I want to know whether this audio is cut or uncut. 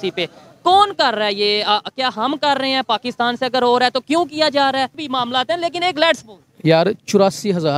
cut